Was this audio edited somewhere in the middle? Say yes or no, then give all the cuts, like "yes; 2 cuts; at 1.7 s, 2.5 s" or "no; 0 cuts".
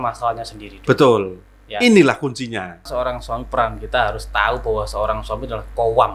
yes; 1 cut; at 2.9 s